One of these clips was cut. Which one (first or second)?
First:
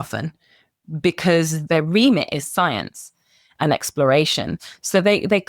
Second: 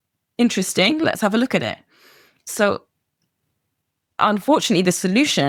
first